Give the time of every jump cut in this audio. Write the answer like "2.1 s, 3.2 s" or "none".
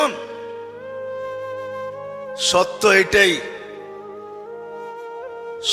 none